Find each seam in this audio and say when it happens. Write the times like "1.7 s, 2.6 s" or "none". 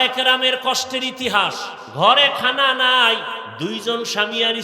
1.8 s, 3.5 s